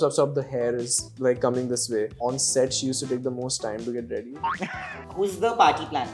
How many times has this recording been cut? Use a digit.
2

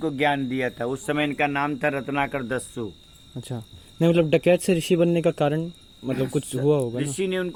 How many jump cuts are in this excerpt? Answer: 0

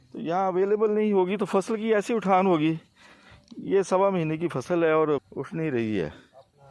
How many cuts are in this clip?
1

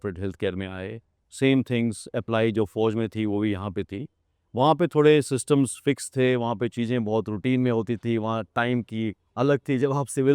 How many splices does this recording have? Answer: 0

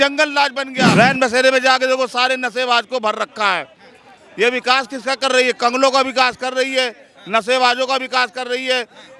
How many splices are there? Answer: 1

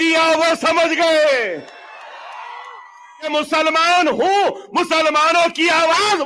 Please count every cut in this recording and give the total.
1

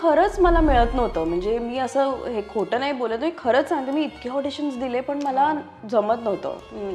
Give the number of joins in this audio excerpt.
0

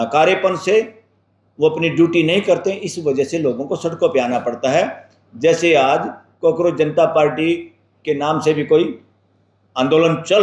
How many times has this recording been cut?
0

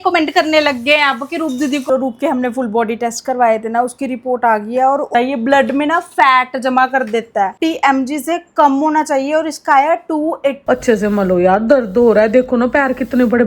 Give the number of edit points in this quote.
4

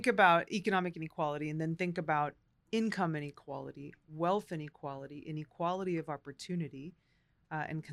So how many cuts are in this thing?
1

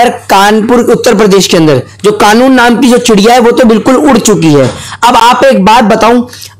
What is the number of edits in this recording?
0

